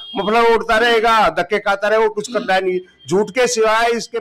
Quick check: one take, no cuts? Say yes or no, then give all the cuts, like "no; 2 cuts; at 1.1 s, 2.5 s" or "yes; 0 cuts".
yes; 0 cuts